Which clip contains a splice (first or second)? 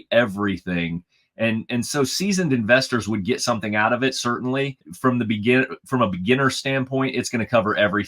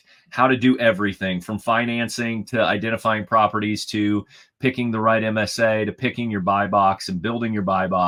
first